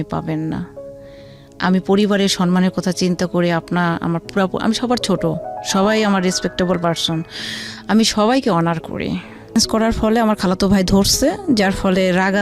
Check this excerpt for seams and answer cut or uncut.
cut